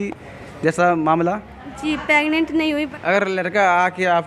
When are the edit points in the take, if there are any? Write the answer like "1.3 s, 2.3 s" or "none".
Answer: 2.9 s